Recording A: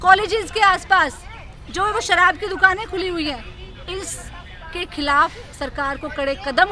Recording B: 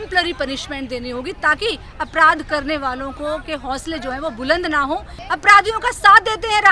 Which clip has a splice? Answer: B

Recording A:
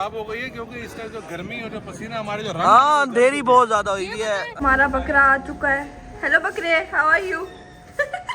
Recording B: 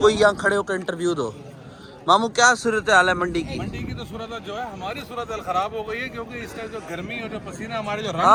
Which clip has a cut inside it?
A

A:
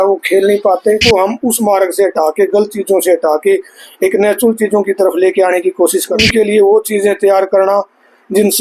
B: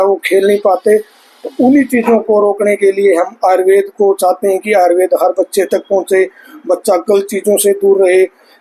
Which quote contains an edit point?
A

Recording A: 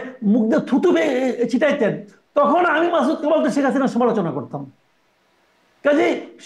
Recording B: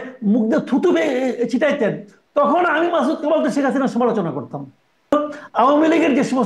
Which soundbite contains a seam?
B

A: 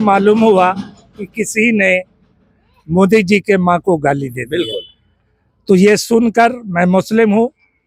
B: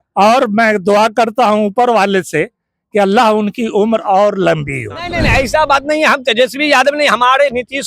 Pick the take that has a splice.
B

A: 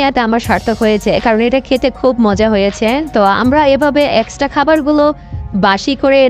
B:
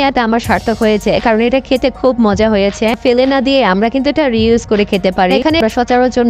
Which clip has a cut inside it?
B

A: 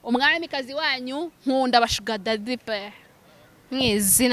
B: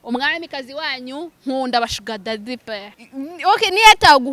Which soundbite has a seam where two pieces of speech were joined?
B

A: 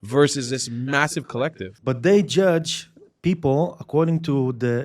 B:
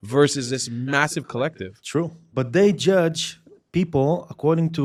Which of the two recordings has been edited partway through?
A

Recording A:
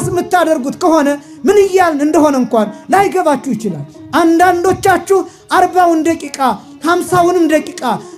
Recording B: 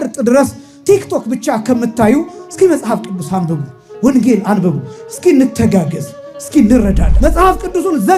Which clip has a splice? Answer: B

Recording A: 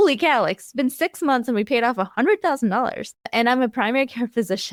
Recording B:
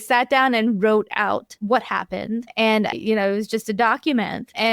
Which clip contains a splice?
B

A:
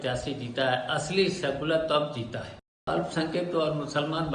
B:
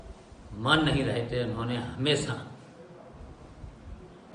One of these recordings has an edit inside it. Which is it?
A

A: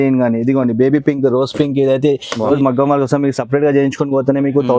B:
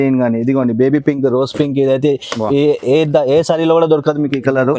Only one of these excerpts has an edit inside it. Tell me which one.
A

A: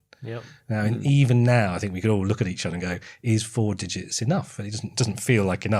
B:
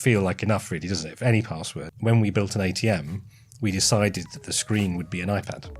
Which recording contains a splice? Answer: B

